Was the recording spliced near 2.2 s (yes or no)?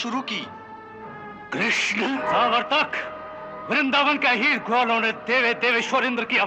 yes